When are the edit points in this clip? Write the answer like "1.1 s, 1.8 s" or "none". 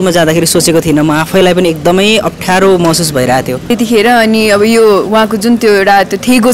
3.7 s